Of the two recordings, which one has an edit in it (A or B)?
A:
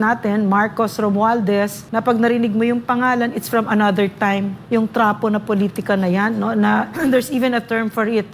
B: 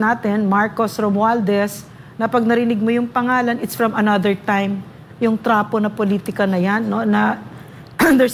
A